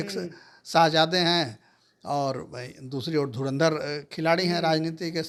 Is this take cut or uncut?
uncut